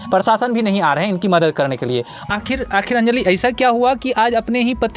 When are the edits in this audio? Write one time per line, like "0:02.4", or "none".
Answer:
0:02.2

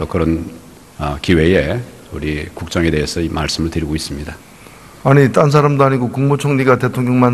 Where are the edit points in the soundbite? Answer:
0:02.4

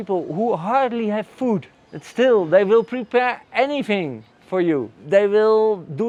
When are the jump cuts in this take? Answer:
none

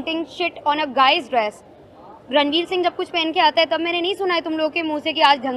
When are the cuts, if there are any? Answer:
none

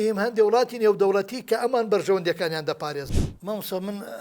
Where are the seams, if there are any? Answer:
0:03.1

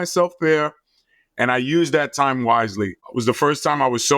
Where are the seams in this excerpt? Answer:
0:03.0

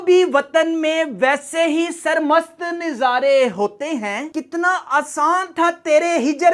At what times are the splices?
0:04.2

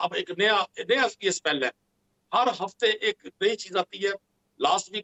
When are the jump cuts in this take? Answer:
none

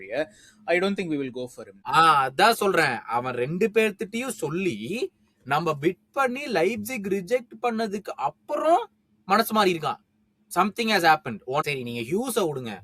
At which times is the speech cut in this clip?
0:01.7
0:11.7

